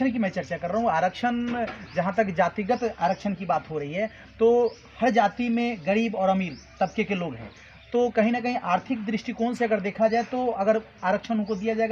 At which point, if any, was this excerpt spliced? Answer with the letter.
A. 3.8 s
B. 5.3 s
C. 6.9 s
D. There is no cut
D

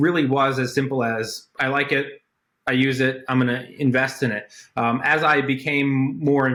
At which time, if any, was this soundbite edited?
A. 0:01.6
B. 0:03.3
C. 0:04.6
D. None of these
D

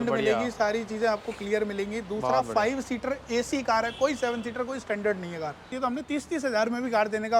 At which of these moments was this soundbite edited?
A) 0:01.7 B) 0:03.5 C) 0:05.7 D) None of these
C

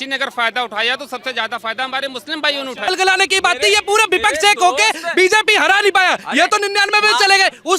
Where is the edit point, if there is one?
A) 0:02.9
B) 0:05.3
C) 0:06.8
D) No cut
A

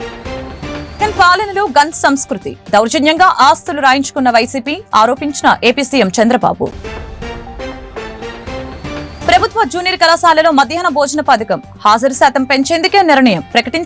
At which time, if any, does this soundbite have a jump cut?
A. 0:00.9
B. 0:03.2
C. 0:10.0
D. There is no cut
A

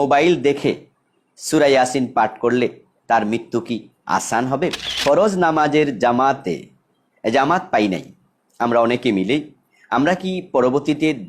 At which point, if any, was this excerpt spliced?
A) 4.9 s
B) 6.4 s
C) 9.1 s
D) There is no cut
A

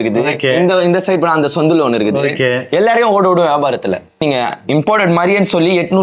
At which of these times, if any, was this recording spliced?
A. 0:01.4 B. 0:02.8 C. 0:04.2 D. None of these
C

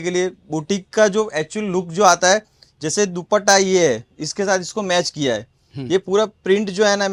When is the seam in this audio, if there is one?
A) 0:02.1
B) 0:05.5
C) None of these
C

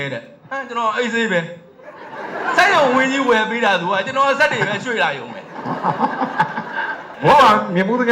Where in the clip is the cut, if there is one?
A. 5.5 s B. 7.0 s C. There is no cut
B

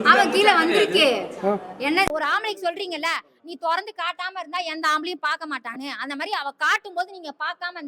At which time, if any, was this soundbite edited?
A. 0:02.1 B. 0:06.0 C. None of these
A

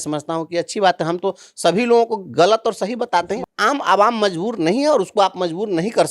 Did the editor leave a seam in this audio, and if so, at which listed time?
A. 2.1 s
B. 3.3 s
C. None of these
B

